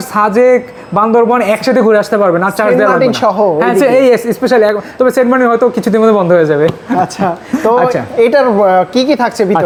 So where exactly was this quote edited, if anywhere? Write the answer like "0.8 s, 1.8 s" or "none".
none